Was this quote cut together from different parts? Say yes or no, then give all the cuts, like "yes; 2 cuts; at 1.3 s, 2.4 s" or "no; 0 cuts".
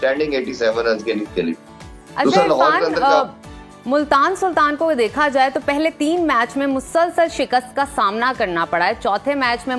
no; 0 cuts